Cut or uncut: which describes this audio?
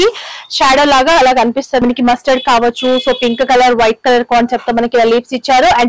cut